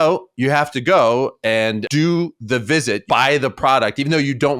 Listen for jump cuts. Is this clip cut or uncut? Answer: cut